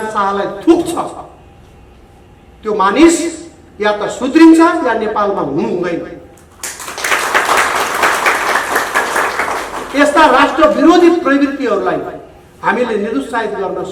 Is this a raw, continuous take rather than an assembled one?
yes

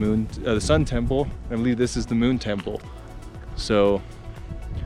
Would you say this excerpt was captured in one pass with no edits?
yes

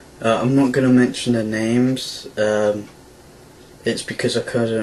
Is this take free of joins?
yes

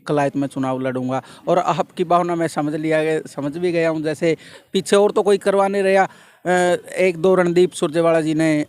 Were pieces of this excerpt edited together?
no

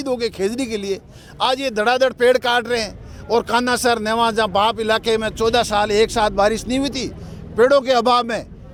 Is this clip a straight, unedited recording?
yes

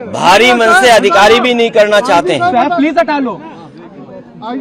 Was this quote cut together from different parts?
no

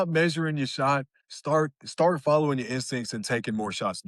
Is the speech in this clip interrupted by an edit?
no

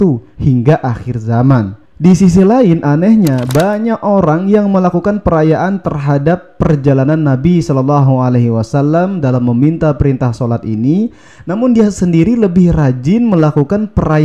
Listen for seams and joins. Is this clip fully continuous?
yes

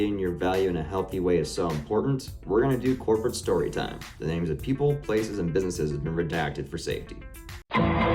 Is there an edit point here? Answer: no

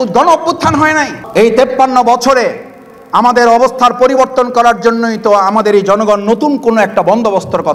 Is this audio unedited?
no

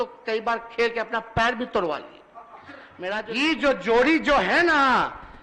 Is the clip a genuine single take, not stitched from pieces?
no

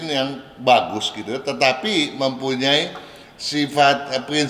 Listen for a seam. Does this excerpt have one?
no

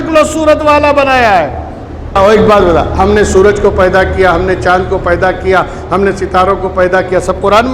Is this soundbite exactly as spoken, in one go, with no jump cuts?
no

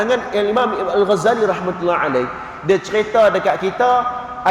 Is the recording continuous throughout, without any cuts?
yes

